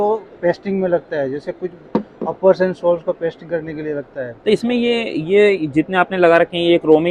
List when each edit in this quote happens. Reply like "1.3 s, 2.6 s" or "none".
none